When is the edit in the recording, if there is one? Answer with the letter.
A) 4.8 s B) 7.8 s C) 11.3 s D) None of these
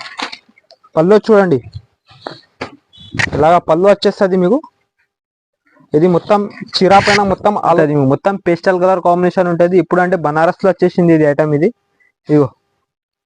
B